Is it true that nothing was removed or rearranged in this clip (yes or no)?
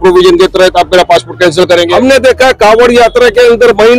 no